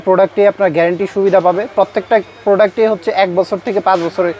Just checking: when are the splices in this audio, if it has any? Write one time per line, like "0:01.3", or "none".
none